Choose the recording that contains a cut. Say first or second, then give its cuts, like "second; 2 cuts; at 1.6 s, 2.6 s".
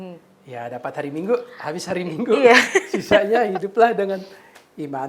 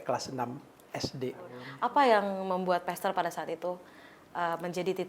second; 1 cut; at 1.6 s